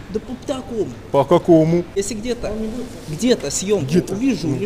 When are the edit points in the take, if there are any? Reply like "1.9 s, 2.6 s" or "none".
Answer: 1.9 s